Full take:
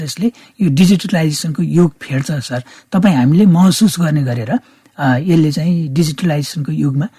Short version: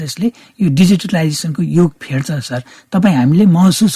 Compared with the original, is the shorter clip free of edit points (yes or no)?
yes